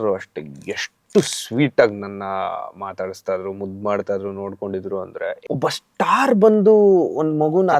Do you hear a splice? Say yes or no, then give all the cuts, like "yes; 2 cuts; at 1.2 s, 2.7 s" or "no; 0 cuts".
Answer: yes; 1 cut; at 5.4 s